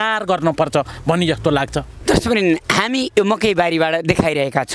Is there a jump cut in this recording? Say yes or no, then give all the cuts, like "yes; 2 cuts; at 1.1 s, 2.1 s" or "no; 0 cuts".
no; 0 cuts